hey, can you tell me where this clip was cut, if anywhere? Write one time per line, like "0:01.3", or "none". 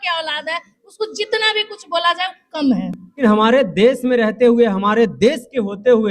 0:03.2